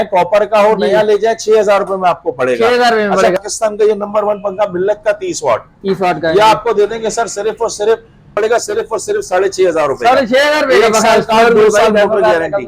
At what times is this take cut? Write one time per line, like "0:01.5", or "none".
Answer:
0:03.4
0:08.3